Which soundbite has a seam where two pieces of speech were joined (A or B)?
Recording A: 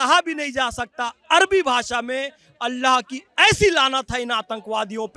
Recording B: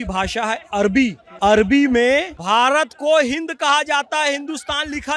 B